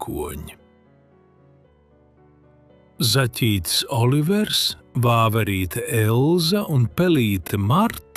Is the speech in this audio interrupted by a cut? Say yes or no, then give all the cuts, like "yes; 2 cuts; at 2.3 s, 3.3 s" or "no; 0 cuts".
no; 0 cuts